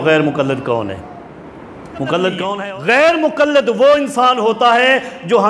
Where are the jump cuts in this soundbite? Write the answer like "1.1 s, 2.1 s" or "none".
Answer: 2.5 s

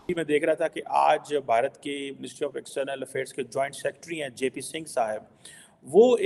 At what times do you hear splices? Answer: none

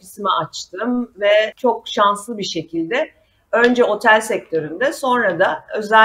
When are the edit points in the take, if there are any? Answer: none

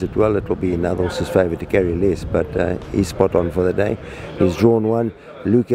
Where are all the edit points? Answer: none

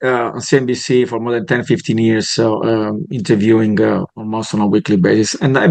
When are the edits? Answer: none

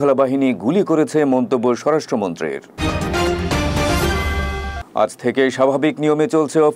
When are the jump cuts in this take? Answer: none

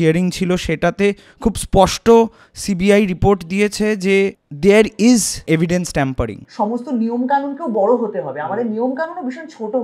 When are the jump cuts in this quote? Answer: 4.5 s, 5.4 s, 6.4 s

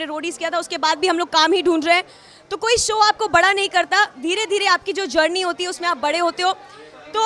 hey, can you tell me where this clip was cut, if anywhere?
none

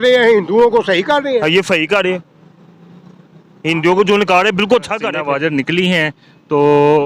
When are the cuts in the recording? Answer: 5.1 s

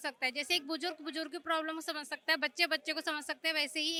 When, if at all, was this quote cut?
none

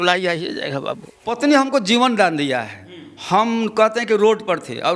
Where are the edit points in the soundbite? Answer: 1.4 s

